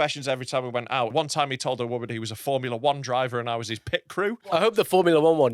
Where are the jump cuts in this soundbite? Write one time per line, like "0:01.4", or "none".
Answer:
0:01.1
0:04.6